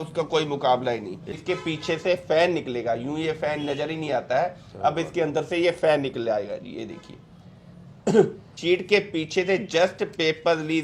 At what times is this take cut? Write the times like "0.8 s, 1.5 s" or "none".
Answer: 1.4 s, 8.5 s